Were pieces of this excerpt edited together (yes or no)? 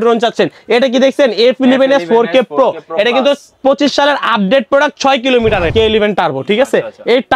yes